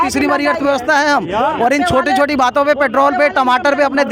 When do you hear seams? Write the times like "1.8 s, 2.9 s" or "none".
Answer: none